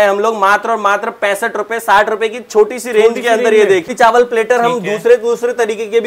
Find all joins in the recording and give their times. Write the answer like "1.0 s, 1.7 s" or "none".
3.9 s